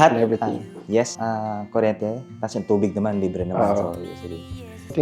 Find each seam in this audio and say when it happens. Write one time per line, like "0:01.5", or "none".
none

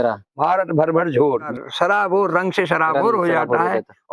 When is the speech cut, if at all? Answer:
0:01.5

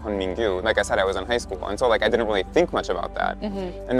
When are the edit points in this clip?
none

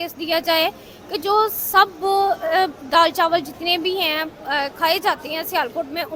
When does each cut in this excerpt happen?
none

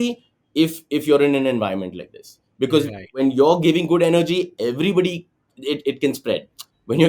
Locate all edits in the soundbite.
0:03.1

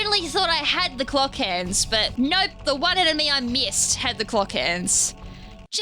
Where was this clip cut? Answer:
0:02.1

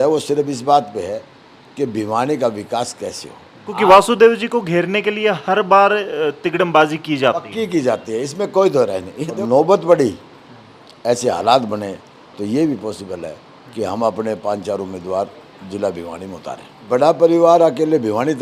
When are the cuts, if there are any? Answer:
0:03.7
0:09.4
0:16.9

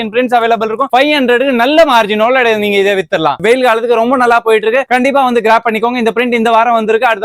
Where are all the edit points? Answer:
none

